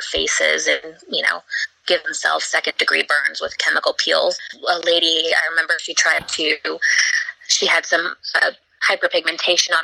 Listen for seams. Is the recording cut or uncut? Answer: cut